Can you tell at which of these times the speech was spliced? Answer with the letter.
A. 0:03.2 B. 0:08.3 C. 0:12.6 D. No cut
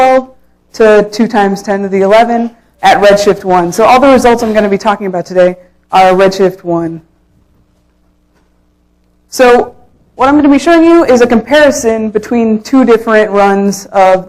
A